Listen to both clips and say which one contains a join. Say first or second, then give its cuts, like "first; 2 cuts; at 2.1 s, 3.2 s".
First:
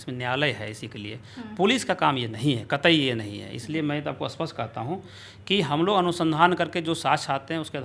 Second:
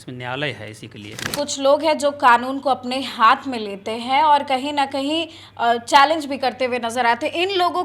second; 1 cut; at 1.3 s